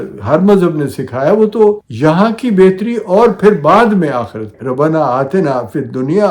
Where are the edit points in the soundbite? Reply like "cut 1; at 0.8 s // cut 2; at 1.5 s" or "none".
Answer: cut 1; at 1.9 s // cut 2; at 4.5 s